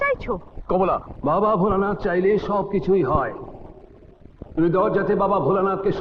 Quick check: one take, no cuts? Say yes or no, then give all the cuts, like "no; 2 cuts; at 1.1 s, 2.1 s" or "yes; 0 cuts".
no; 1 cut; at 1.1 s